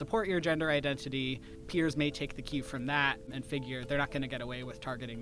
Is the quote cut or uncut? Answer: cut